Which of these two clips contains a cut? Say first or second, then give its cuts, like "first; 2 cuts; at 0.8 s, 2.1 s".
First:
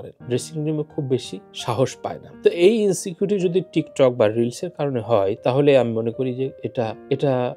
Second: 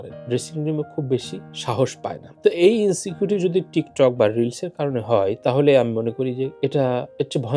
second; 1 cut; at 6.5 s